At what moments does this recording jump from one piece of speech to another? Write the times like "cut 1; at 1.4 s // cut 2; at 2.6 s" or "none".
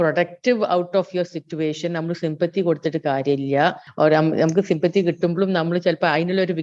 cut 1; at 3.8 s